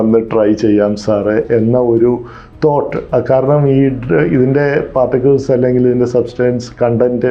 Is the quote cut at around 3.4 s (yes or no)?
no